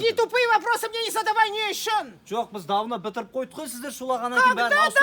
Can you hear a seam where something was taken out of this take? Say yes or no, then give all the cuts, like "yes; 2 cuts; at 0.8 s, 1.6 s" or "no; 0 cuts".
no; 0 cuts